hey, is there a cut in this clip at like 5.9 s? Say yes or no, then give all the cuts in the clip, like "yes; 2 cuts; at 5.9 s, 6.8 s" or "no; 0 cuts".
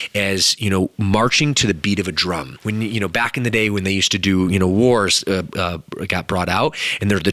no; 1 cut; at 2.5 s